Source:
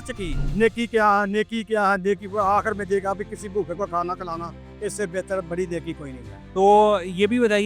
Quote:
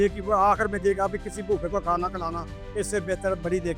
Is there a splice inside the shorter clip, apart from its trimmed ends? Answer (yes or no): no